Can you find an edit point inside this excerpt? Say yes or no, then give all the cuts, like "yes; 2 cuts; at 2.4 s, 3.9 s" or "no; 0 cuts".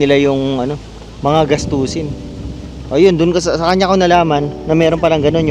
no; 0 cuts